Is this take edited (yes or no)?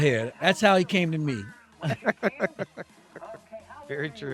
no